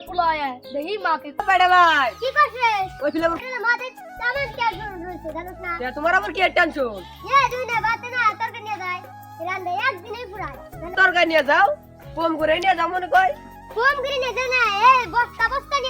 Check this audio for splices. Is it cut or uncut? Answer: cut